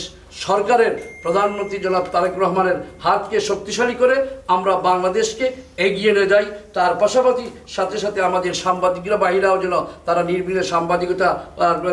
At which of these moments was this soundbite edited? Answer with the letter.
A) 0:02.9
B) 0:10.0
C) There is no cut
C